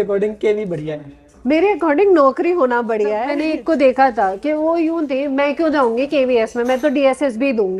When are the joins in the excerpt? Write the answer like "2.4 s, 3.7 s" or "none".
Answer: 3.4 s